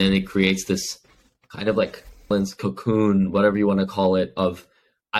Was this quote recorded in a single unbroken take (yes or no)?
no